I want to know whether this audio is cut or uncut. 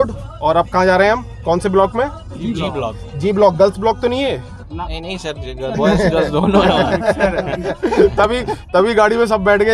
uncut